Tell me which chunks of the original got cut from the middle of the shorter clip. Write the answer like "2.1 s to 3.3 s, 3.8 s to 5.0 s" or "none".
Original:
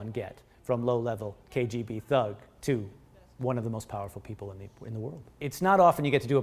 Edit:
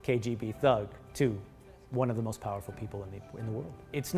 none